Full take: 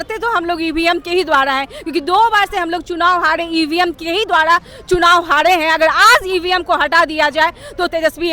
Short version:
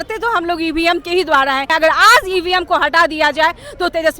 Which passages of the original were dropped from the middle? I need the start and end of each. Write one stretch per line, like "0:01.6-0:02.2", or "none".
0:01.7-0:05.7